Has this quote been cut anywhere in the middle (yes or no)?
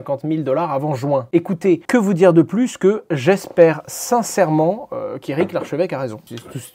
no